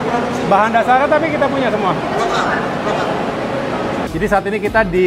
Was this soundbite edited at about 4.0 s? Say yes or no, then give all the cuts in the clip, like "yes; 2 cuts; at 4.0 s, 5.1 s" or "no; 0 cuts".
yes; 1 cut; at 4.0 s